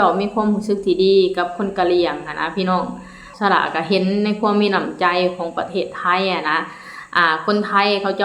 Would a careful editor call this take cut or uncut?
cut